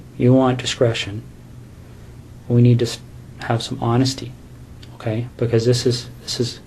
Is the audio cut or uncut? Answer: uncut